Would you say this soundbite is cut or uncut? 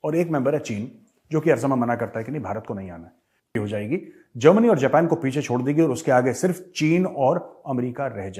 cut